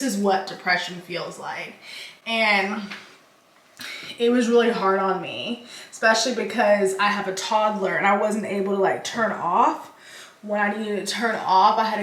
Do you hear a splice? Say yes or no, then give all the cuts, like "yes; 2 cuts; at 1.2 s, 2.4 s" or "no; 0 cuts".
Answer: no; 0 cuts